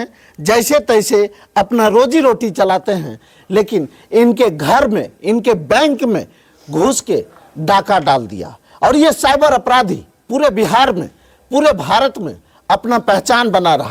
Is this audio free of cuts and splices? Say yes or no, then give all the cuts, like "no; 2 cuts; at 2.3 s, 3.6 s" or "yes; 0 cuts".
yes; 0 cuts